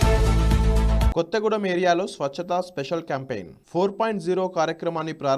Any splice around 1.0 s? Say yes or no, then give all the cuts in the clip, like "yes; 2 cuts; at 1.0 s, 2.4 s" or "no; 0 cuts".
yes; 1 cut; at 1.0 s